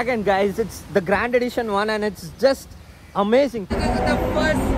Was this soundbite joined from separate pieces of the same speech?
yes; 1 cut; at 3.7 s

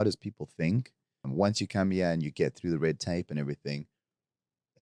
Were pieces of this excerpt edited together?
yes; 1 cut; at 1.3 s

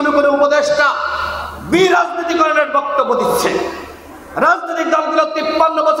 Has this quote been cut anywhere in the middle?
no; 0 cuts

